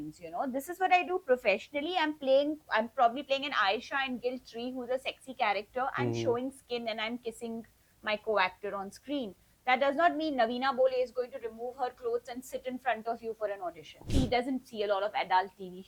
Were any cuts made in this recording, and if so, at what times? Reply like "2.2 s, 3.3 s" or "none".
14.1 s